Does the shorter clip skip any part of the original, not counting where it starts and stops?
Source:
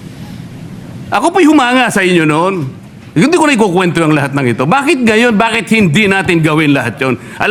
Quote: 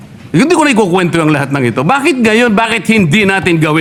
no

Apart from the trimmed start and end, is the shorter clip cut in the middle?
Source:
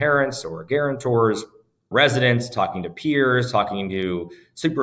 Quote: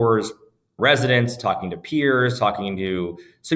no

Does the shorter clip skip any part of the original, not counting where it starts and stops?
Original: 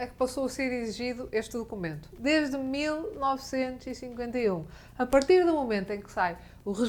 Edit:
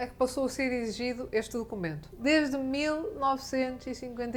no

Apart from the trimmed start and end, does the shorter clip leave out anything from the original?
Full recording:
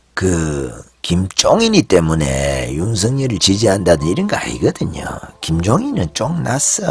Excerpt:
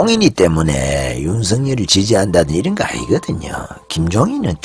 no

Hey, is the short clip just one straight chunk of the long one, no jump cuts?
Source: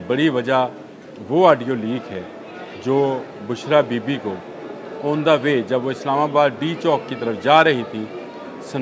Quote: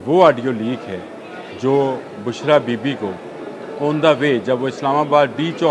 yes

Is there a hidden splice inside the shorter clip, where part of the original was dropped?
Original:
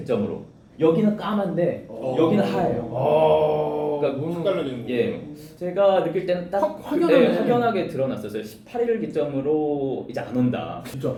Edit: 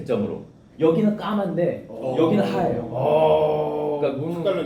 no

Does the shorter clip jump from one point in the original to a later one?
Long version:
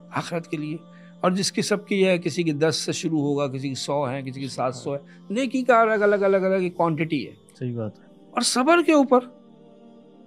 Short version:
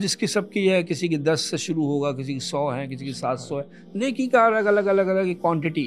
no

